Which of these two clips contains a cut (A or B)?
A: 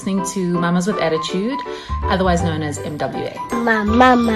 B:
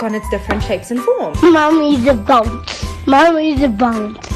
B